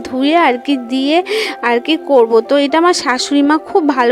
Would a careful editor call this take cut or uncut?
uncut